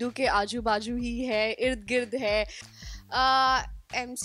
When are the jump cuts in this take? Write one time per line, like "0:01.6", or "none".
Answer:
0:02.7